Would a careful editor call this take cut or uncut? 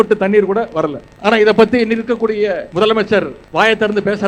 cut